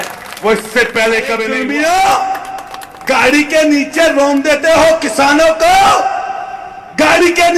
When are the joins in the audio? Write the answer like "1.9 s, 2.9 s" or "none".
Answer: 1.5 s